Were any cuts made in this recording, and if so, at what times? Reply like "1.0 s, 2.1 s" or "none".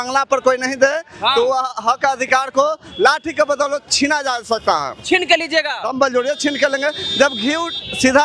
none